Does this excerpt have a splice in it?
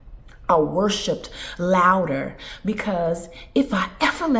no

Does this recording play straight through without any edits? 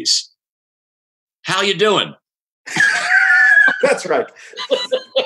yes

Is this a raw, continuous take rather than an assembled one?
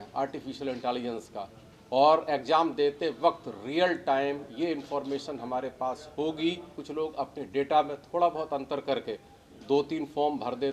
no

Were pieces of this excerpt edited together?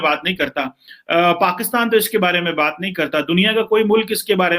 no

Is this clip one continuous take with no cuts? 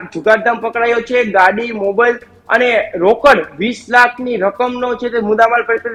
yes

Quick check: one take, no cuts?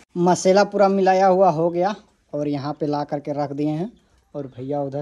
yes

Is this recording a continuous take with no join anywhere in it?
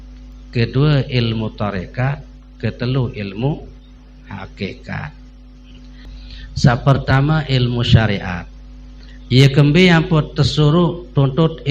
no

